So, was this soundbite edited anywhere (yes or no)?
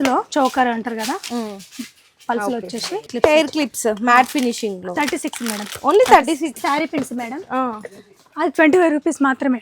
yes